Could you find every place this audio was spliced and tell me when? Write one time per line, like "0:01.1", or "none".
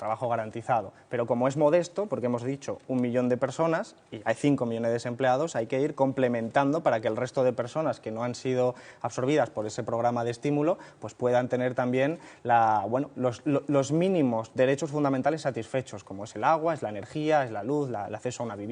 0:06.1